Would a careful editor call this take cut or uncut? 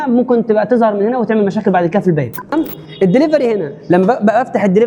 cut